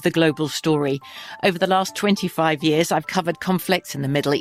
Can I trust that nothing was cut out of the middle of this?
yes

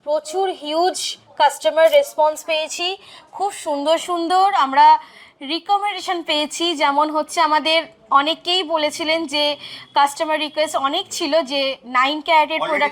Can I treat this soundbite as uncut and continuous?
yes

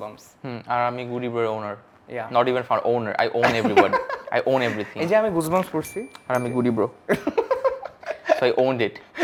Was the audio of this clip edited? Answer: no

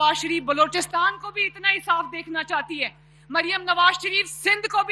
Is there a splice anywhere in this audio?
no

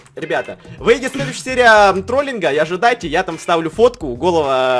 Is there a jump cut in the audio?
no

